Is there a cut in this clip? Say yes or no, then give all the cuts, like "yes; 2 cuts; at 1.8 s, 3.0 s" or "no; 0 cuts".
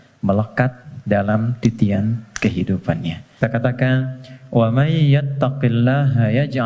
yes; 1 cut; at 3.4 s